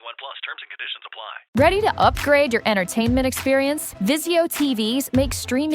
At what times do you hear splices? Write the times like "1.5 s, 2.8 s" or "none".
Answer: 1.4 s